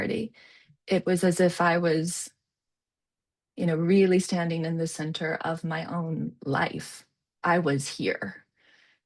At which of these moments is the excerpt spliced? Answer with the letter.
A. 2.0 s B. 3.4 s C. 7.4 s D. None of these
C